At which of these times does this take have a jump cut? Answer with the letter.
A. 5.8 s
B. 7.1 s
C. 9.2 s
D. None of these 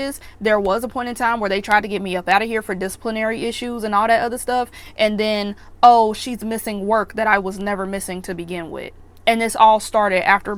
D